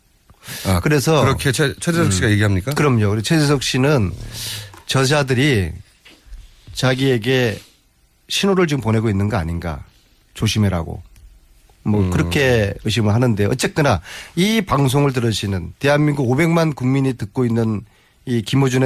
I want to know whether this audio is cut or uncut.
uncut